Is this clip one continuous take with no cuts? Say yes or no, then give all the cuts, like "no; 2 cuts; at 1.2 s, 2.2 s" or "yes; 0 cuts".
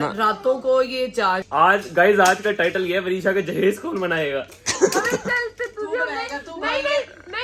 no; 1 cut; at 1.4 s